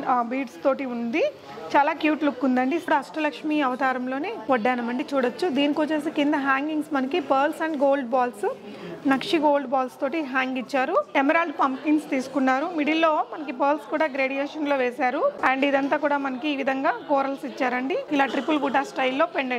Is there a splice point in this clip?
yes; 4 cuts; at 2.9 s, 11.1 s, 15.4 s, 18.0 s

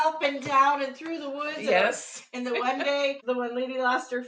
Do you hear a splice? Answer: yes; 1 cut; at 3.2 s

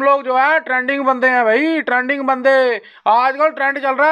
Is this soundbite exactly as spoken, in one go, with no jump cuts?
yes; 0 cuts

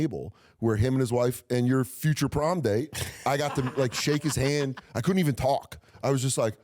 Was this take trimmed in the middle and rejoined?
yes; 2 cuts; at 3.1 s, 4.9 s

